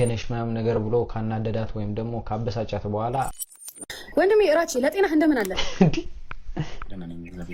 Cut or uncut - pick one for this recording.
cut